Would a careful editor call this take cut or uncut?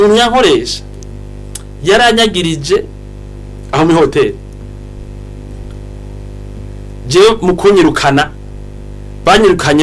uncut